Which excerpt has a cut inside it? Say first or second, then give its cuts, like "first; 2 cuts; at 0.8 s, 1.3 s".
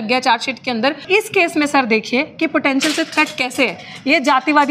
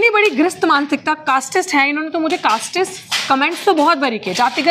first; 1 cut; at 1.0 s